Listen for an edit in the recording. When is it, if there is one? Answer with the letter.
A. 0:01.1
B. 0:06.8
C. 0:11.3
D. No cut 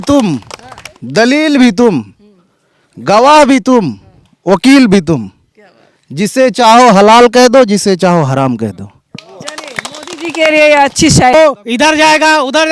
C